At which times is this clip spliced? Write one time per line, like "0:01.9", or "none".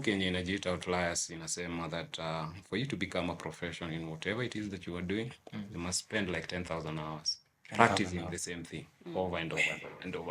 none